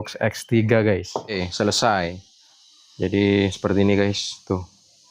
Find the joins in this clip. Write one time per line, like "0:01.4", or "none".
0:01.4